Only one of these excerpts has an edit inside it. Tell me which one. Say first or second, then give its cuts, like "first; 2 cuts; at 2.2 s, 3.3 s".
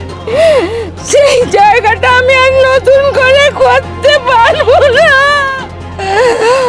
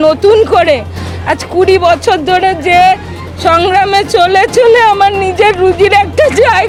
first; 1 cut; at 5.5 s